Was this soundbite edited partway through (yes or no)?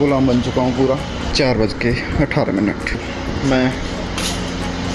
yes